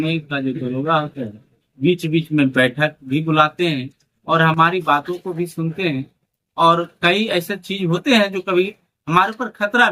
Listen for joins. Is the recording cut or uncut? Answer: uncut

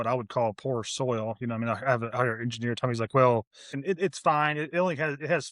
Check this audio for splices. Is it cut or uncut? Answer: cut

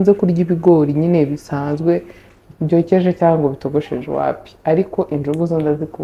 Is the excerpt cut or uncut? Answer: uncut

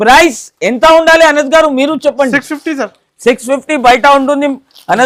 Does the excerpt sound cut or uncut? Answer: uncut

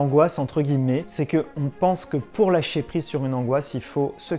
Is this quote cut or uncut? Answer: cut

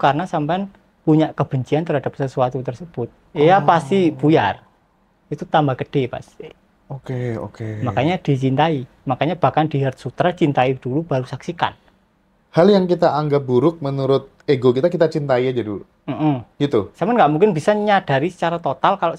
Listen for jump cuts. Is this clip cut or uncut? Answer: uncut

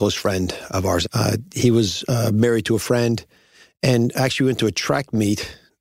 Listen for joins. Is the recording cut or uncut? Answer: cut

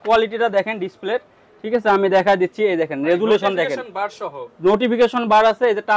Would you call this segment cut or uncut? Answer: uncut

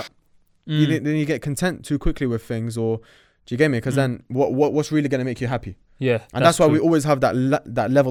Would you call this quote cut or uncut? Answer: uncut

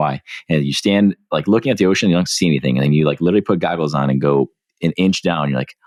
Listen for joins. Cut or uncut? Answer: uncut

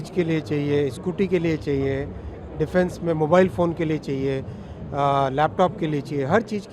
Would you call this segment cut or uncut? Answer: uncut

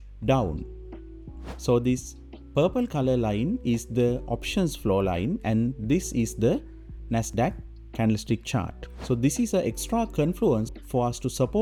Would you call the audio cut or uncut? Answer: uncut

